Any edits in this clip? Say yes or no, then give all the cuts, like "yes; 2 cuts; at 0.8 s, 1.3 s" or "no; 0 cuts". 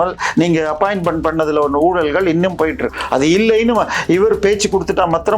yes; 1 cut; at 2.9 s